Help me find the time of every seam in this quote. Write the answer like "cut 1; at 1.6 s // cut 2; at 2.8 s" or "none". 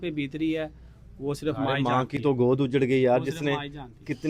none